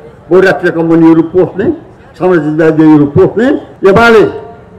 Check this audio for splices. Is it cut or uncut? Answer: cut